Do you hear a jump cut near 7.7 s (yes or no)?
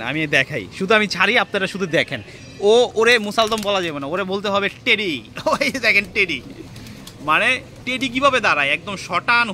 no